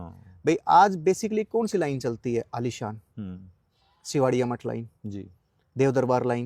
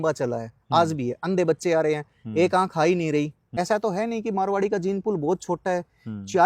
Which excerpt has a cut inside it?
second; 1 cut; at 3.6 s

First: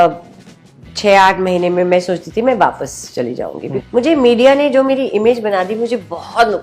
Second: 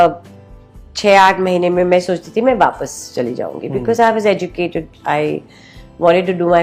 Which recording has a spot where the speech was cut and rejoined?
first; 1 cut; at 3.2 s

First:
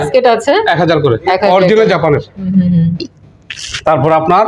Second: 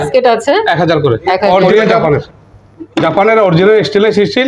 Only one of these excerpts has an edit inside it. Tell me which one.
second; 1 cut; at 2.3 s

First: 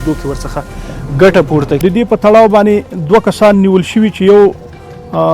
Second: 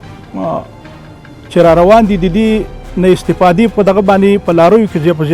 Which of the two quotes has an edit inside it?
first; 1 cut; at 1.8 s

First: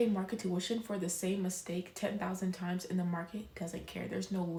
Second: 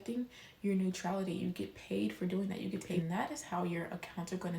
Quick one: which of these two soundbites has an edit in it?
second; 1 cut; at 3.0 s

